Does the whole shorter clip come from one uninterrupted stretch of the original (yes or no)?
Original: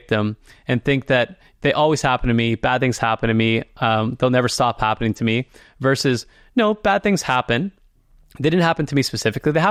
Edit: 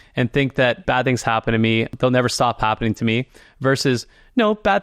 no